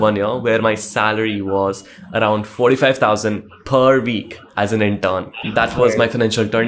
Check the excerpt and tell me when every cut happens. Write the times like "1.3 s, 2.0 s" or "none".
none